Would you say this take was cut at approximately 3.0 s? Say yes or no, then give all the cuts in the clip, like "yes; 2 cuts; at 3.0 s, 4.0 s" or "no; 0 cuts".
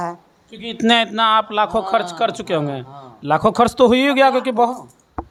no; 0 cuts